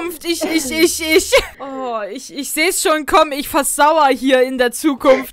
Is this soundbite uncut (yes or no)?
no